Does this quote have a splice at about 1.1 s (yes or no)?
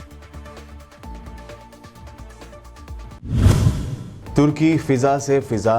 yes